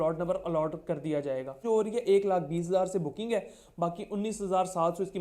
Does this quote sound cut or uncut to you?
cut